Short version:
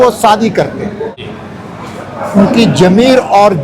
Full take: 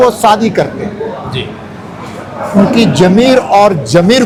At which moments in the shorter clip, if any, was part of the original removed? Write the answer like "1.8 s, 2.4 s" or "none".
1.2 s